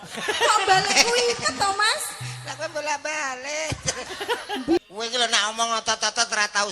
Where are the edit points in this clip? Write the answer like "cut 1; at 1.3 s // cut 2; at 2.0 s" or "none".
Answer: cut 1; at 4.8 s